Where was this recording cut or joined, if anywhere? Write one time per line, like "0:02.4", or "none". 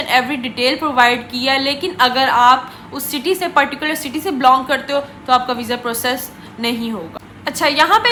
none